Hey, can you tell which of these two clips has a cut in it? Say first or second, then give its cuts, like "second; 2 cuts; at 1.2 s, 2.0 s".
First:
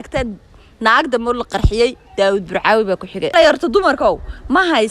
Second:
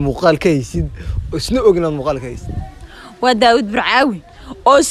first; 1 cut; at 3.3 s